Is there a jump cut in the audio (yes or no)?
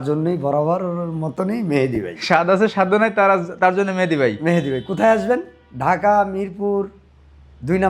no